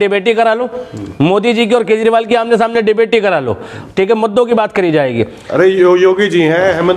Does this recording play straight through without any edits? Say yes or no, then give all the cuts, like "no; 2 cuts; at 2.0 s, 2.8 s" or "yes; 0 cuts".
yes; 0 cuts